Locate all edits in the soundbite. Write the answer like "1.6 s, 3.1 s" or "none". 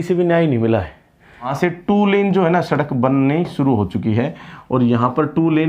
1.5 s